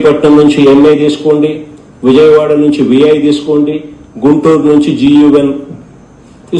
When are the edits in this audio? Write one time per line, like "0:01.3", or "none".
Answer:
none